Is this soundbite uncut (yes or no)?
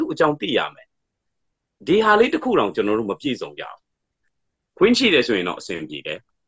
no